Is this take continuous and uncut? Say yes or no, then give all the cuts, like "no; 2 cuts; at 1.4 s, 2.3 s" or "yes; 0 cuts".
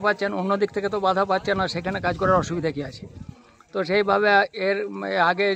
yes; 0 cuts